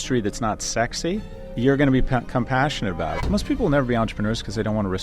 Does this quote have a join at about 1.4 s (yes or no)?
yes